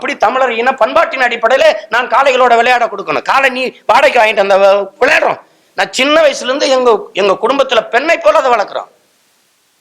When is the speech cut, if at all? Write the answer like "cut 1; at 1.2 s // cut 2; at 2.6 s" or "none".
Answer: none